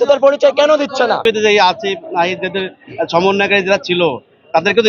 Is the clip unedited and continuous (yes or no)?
no